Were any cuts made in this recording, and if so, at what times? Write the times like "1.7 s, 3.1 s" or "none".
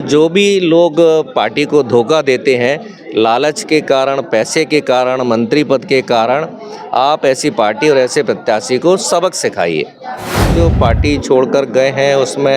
10.5 s